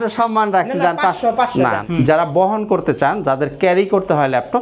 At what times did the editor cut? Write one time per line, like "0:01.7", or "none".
0:01.8